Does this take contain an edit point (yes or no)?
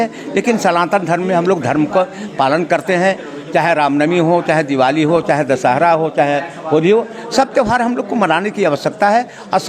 no